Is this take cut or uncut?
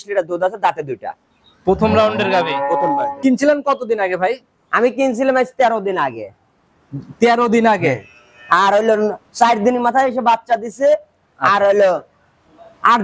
cut